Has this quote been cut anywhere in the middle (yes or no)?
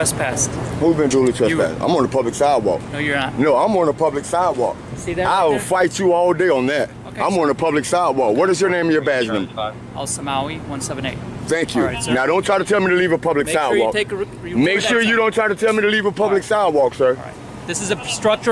no